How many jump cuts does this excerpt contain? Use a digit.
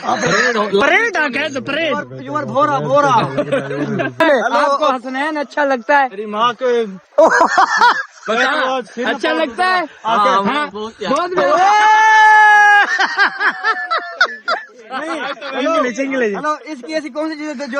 1